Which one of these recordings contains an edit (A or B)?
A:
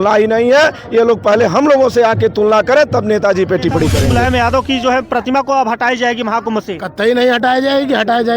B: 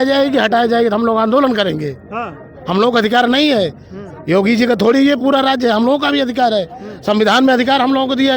A